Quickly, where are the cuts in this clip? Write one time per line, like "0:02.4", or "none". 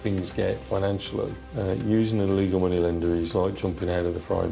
none